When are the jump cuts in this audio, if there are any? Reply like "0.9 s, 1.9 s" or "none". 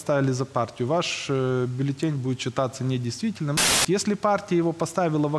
3.6 s